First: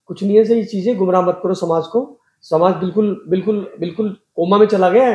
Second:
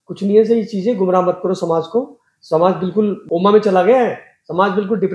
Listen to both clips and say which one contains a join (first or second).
second